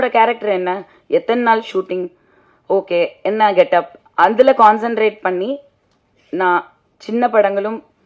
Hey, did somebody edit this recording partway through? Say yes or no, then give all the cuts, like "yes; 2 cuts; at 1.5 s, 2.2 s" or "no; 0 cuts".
no; 0 cuts